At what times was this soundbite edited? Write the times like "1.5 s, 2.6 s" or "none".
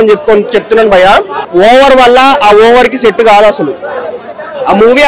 1.4 s